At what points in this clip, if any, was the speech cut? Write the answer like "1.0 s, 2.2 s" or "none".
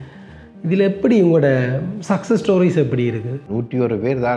3.4 s